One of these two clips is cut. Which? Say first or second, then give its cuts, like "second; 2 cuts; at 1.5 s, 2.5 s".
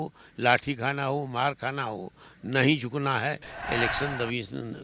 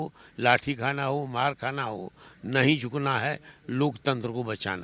first; 1 cut; at 3.5 s